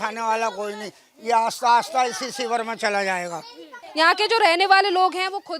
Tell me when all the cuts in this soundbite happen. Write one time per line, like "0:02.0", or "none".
0:03.8